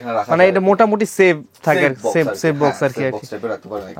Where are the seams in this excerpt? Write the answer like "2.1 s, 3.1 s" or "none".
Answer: none

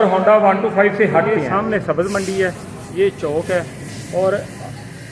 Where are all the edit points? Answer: 1.5 s

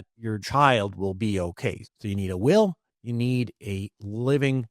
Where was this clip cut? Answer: 1.8 s

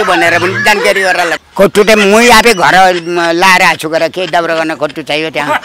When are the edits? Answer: 1.4 s

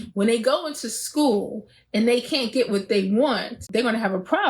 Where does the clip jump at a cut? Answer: 3.6 s

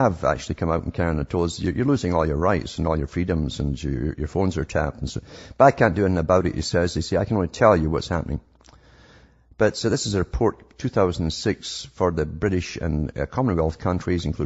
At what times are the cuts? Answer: 12.1 s

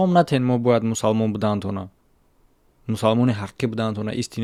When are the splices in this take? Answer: none

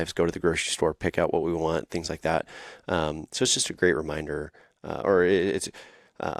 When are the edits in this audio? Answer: none

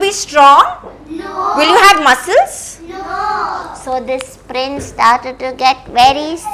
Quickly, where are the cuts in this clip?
none

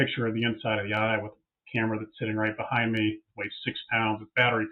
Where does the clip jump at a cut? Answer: none

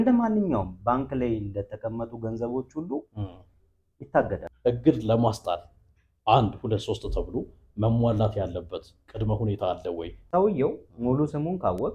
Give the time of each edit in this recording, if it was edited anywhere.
4.4 s, 10.2 s

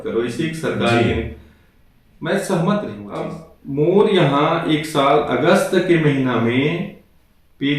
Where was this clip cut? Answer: 3.0 s

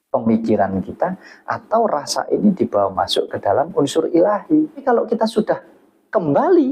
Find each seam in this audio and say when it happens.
4.8 s

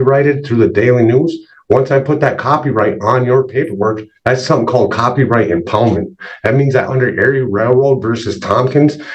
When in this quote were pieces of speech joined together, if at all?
none

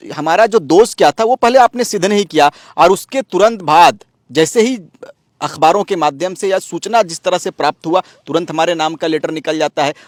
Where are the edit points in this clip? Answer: none

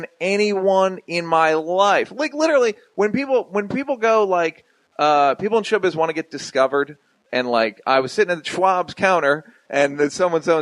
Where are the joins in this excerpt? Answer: 5.1 s

